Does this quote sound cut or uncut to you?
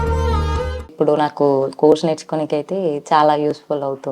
cut